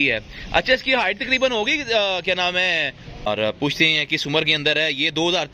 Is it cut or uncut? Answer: cut